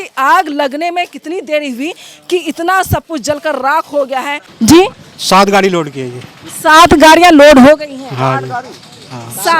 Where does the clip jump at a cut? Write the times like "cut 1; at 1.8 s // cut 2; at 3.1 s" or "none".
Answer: cut 1; at 4.4 s